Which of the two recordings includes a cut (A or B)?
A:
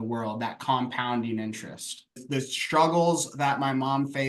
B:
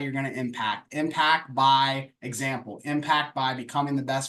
A